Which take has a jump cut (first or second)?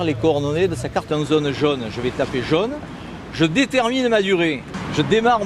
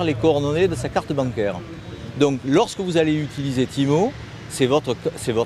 second